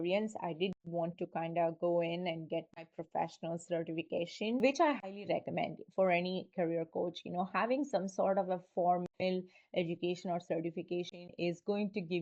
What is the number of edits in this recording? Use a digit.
1